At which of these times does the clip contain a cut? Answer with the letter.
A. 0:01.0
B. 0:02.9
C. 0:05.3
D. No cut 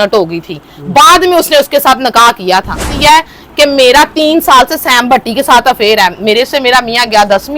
B